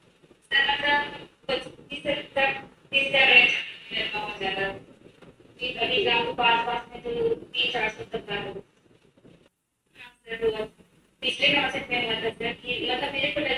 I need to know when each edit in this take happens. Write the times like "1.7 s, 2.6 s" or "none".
9.7 s

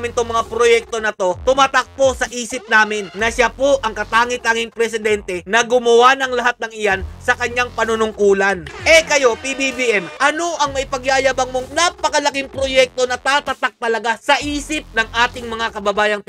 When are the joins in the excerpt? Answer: 8.7 s, 11.7 s

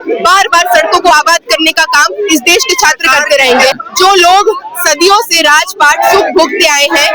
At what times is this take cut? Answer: 3.7 s

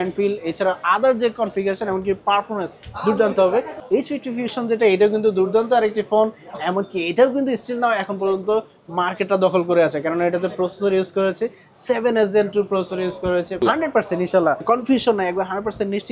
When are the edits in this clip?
3.8 s, 13.6 s, 14.6 s

